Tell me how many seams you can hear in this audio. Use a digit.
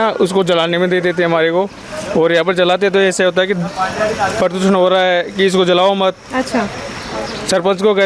0